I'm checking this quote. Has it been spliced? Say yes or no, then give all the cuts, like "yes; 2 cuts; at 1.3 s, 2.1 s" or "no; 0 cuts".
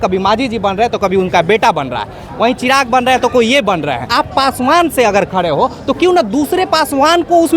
yes; 1 cut; at 4.1 s